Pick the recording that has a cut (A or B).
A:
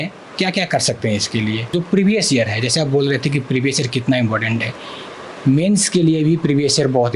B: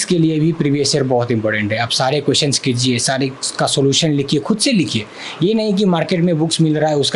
A